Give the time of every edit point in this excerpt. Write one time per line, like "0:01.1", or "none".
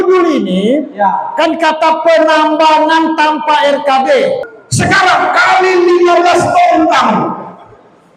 0:04.5